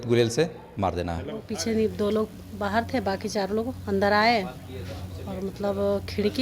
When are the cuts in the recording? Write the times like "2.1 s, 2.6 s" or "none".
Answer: 1.5 s